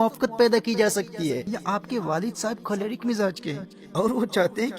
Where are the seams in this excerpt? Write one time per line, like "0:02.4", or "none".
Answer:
0:01.5